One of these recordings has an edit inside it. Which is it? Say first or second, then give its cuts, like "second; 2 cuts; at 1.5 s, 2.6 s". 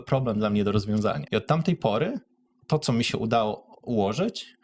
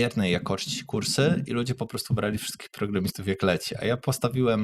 first; 1 cut; at 1.2 s